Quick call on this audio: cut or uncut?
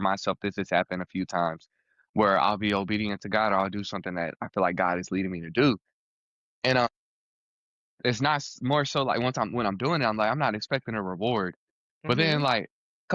uncut